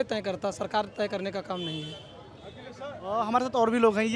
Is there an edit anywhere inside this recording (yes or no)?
no